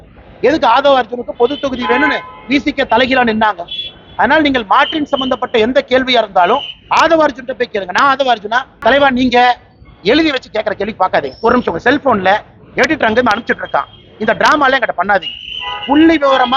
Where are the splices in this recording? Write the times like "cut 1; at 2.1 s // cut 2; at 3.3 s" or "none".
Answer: cut 1; at 8.7 s